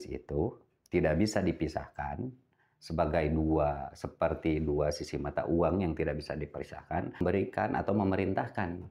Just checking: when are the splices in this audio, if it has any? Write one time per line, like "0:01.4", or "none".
0:07.2